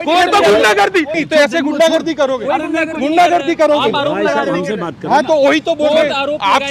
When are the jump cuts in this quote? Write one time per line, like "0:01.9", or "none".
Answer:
0:01.3